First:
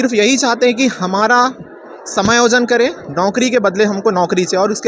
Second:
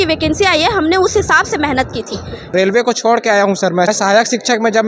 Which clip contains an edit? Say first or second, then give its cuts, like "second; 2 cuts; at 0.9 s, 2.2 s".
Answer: second; 2 cuts; at 2.5 s, 3.9 s